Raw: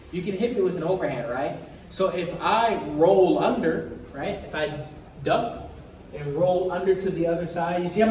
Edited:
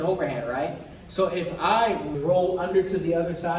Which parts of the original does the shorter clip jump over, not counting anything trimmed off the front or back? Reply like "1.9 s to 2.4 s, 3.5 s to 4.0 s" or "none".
2.9 s to 6.2 s